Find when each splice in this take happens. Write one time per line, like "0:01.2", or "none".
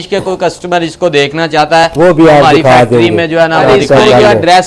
0:03.6